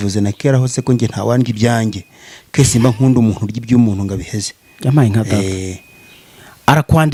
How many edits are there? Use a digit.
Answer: 0